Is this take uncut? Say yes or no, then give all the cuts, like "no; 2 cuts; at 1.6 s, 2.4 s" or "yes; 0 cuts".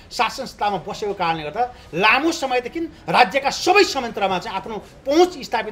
yes; 0 cuts